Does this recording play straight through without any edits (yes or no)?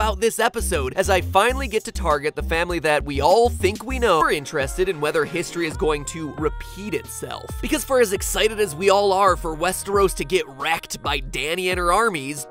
yes